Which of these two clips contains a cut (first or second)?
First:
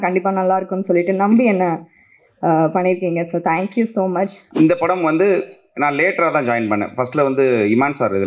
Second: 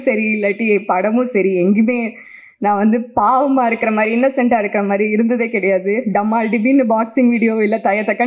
first